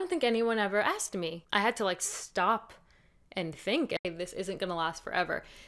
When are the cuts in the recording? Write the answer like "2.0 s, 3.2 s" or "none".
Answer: 1.4 s, 4.0 s